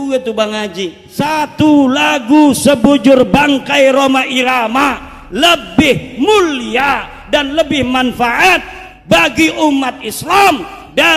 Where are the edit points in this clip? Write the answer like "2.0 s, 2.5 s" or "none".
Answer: 1.0 s